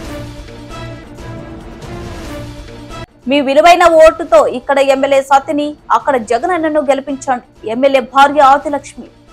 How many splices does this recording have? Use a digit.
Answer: 1